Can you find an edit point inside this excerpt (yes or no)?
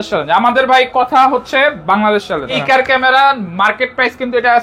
yes